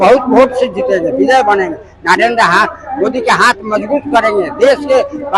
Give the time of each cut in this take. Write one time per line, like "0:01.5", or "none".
none